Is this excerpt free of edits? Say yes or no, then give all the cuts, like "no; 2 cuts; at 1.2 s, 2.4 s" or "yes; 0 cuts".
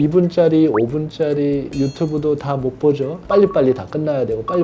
no; 1 cut; at 3.2 s